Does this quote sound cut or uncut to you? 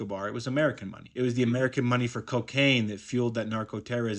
uncut